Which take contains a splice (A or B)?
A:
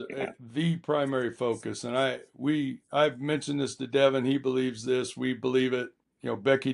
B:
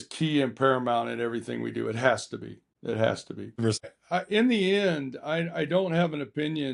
B